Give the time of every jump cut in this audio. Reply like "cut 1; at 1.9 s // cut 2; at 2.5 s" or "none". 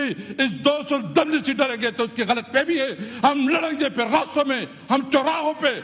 none